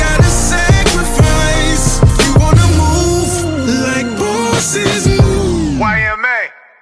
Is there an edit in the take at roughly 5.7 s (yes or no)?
no